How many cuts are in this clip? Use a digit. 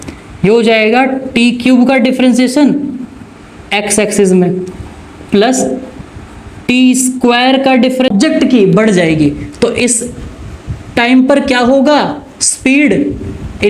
1